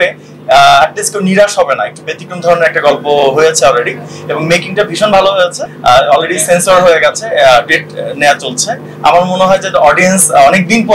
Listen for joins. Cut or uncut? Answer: uncut